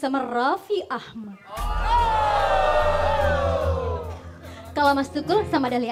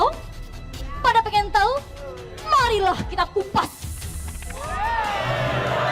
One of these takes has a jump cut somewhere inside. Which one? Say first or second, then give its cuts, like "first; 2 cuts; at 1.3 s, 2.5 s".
second; 1 cut; at 1.6 s